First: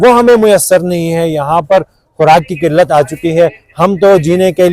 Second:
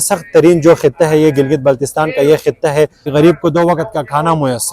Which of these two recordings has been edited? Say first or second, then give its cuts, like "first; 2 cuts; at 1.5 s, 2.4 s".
second; 1 cut; at 3.0 s